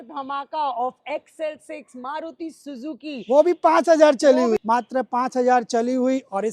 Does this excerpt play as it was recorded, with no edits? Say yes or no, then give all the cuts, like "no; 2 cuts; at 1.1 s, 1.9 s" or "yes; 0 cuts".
no; 1 cut; at 4.6 s